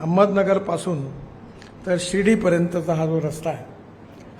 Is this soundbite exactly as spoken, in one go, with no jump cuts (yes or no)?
yes